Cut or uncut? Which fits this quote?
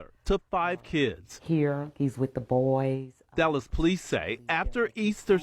cut